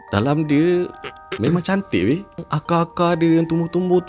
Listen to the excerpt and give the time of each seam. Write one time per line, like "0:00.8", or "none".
0:02.5